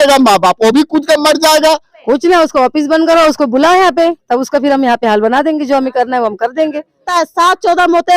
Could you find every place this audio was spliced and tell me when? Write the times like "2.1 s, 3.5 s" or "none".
1.9 s, 7.1 s